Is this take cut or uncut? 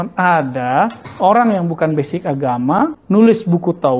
cut